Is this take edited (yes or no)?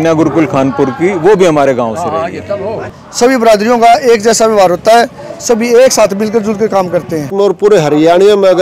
yes